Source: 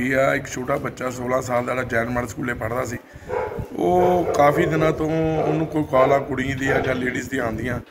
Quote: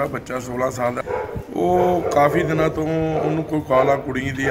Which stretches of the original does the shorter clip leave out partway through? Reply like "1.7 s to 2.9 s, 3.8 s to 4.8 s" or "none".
1.7 s to 3.2 s